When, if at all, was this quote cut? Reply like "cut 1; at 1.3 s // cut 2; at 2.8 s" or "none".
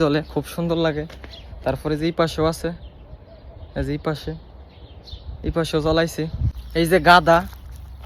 cut 1; at 6.4 s